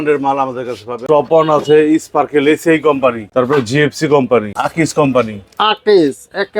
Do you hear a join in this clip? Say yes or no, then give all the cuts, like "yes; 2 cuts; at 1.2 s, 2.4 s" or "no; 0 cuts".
yes; 3 cuts; at 1.0 s, 3.2 s, 4.6 s